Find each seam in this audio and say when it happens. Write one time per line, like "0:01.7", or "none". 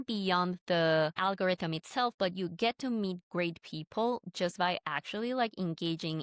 0:01.2